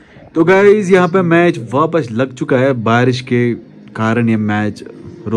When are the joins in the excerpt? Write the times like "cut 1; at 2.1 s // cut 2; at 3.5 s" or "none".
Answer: none